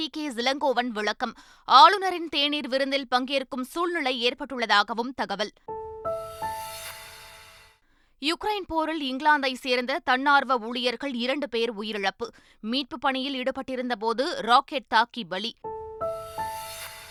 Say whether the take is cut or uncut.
uncut